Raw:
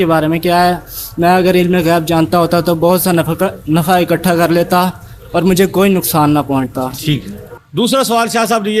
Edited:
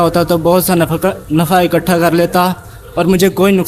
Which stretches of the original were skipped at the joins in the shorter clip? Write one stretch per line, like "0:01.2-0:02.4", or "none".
none